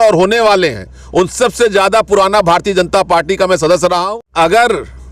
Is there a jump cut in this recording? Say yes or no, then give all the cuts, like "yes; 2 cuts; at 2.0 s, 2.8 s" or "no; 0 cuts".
yes; 1 cut; at 4.0 s